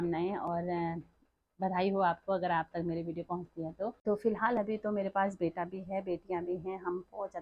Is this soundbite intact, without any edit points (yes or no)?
no